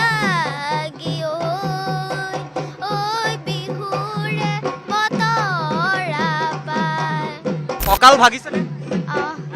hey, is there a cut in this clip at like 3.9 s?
no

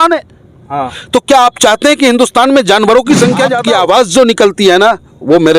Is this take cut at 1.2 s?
no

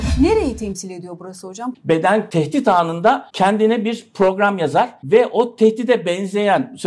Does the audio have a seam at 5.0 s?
yes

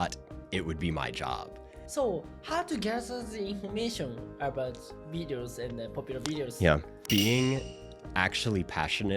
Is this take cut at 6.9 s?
yes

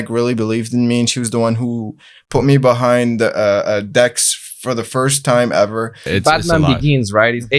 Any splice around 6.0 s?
yes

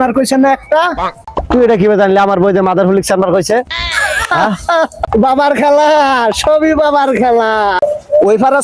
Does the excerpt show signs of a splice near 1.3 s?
yes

